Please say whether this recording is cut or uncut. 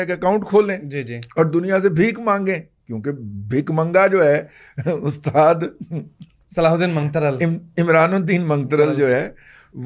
uncut